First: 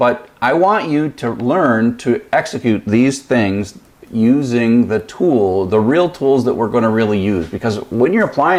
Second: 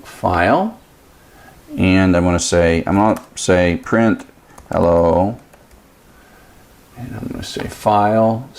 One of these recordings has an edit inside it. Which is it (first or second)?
second